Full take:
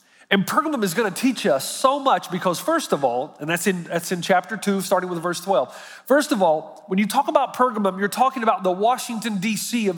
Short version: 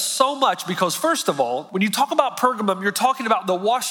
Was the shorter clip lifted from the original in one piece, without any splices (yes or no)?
no